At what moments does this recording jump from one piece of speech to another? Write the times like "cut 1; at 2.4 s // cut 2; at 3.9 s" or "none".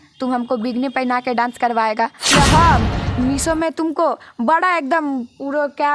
cut 1; at 2.3 s